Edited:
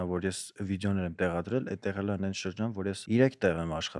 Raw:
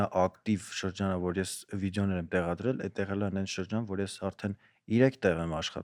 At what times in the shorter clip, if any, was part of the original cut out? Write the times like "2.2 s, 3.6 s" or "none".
3.0 s